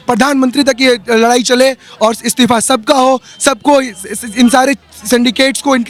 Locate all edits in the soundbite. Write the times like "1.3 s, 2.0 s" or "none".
none